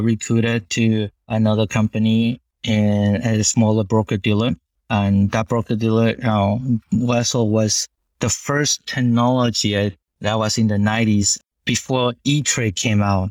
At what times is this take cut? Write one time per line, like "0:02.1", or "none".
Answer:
0:01.3
0:04.7
0:10.1